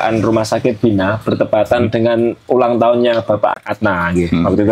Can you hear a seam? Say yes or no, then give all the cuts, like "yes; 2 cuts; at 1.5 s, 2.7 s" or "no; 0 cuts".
yes; 1 cut; at 3.6 s